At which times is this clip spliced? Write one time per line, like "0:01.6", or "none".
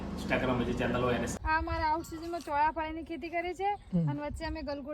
0:01.4